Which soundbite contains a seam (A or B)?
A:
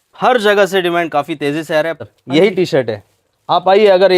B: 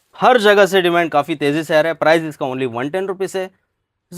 A